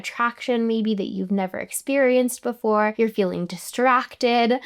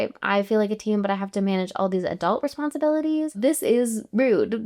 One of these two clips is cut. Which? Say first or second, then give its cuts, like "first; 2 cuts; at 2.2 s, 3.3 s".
first; 1 cut; at 2.9 s